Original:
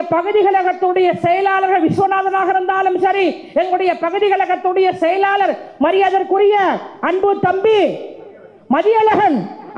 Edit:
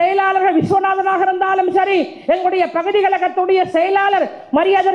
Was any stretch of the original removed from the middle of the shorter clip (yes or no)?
no